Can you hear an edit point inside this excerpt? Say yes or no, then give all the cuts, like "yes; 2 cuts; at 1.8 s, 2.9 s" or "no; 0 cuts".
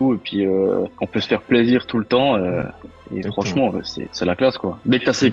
no; 0 cuts